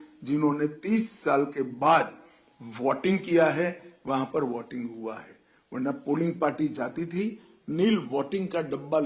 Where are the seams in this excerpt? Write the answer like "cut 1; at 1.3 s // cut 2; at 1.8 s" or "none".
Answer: none